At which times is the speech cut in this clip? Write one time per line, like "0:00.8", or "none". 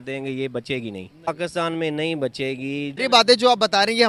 0:01.3
0:02.9